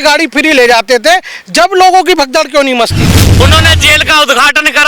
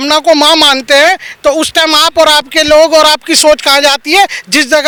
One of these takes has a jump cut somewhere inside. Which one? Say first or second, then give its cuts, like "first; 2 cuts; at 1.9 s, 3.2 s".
first; 1 cut; at 3.4 s